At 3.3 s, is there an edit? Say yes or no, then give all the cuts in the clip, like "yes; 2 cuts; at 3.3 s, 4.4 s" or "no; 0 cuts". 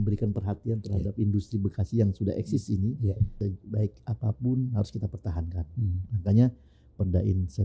yes; 1 cut; at 3.3 s